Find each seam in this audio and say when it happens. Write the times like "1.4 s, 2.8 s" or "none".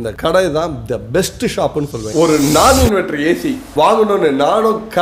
2.0 s